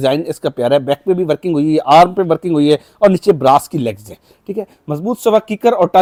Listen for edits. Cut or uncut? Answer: uncut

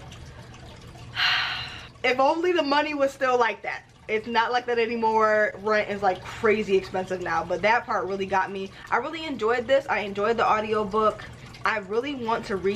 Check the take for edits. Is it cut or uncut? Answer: uncut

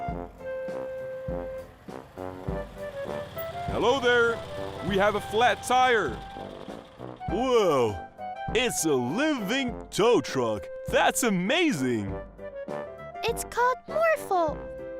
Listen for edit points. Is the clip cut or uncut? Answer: cut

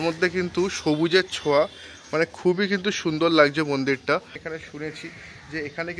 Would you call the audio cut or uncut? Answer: cut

